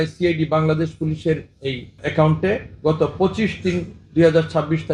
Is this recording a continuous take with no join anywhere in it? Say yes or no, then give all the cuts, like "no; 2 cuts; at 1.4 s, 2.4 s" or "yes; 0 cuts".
yes; 0 cuts